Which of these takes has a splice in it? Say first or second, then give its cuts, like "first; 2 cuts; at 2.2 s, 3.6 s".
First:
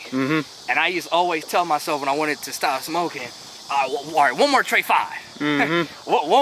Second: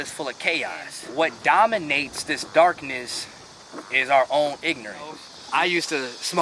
second; 2 cuts; at 1.0 s, 5.3 s